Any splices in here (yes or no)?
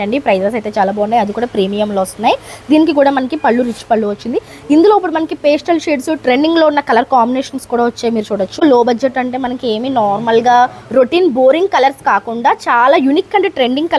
no